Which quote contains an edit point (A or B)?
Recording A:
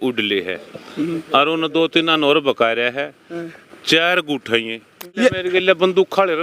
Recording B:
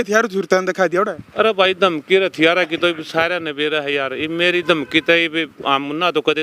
A